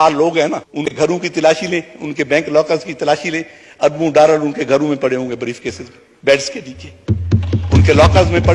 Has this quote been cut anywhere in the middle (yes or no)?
yes